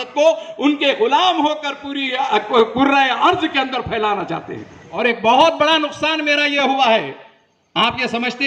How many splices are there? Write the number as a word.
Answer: one